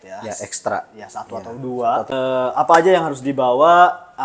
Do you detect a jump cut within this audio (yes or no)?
yes